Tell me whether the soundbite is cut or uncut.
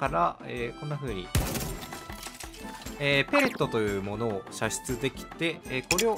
uncut